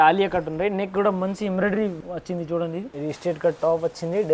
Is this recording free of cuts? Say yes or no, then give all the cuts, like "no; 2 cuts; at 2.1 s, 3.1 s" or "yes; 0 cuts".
no; 2 cuts; at 1.9 s, 2.9 s